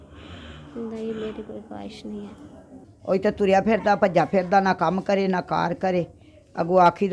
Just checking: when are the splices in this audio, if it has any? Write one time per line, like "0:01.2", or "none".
0:02.8